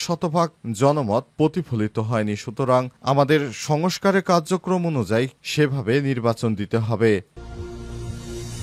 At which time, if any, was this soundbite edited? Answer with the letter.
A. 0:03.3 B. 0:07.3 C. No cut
B